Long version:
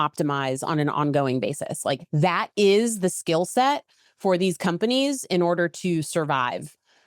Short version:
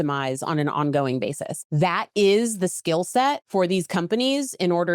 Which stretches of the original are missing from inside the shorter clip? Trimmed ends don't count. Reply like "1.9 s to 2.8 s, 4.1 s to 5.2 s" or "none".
1.8 s to 2.0 s, 3.8 s to 4.1 s